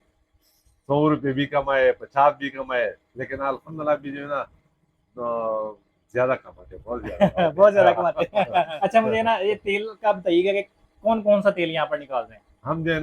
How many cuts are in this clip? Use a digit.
1